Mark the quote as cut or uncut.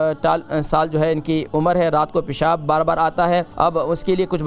cut